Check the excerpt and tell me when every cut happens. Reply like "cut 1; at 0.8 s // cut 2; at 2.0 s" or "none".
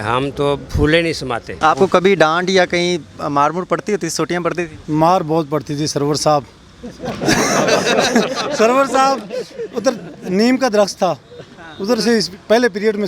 cut 1; at 1.5 s